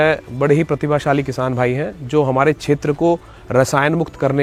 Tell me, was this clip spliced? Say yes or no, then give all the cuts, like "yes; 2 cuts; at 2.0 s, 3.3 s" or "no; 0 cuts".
no; 0 cuts